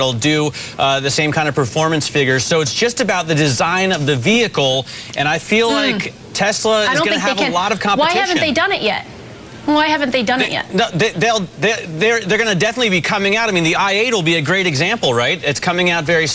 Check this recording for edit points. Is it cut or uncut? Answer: uncut